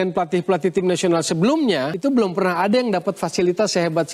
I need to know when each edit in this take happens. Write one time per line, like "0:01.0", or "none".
none